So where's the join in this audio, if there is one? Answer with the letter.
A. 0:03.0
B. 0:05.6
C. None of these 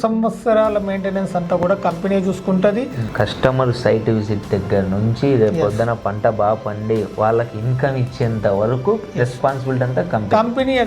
A